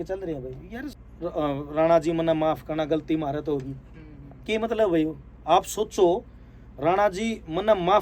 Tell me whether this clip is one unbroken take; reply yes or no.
no